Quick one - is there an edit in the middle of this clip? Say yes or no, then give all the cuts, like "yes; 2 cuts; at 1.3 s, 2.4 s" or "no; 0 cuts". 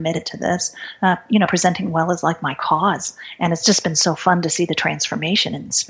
no; 0 cuts